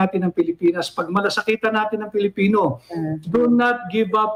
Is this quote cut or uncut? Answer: uncut